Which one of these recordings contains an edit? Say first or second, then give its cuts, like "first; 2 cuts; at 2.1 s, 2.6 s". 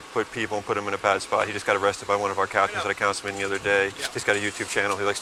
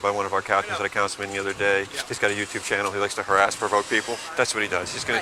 second; 1 cut; at 4.3 s